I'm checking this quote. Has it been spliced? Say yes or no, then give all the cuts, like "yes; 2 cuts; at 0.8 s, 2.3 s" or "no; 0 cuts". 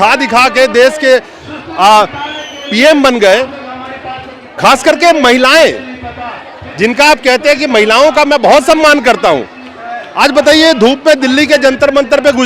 no; 0 cuts